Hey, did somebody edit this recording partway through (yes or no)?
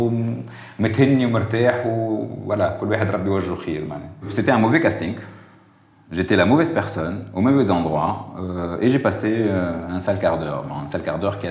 yes